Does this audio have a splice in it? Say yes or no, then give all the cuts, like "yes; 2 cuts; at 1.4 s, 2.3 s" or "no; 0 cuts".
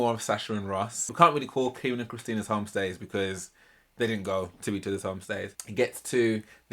yes; 2 cuts; at 1.1 s, 5.5 s